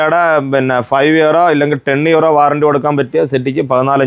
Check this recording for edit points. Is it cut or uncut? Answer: uncut